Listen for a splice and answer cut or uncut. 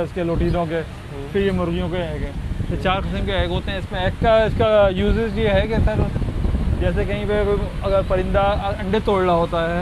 uncut